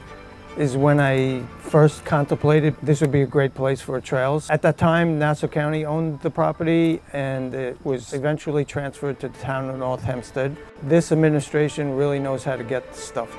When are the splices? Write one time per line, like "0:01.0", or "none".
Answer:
0:04.5
0:08.1
0:10.7